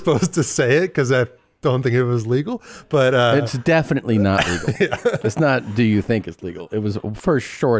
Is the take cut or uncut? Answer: uncut